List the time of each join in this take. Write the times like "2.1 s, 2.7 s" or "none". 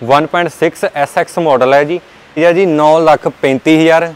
2.4 s